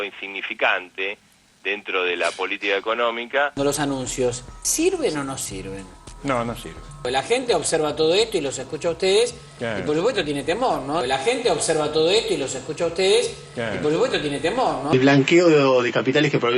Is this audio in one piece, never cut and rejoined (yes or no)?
no